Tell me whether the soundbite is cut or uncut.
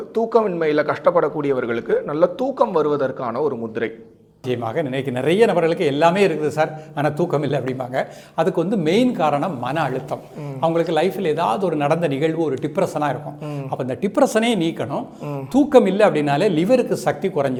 uncut